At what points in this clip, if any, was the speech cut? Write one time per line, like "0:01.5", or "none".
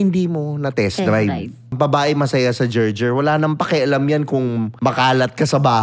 0:01.7
0:04.7

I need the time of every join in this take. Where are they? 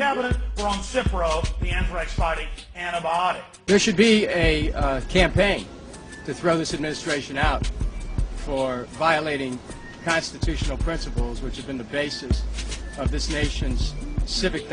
0:08.0

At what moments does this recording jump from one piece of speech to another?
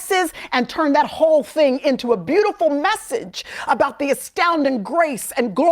none

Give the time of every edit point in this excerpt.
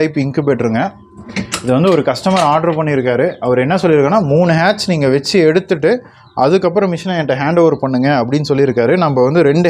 none

